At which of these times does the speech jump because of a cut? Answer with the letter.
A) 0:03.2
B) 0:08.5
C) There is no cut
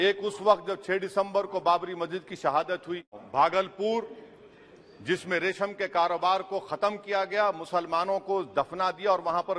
A